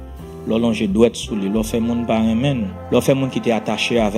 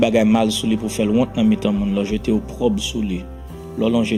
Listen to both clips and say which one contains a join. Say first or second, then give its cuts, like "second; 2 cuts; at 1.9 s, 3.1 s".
first; 1 cut; at 2.8 s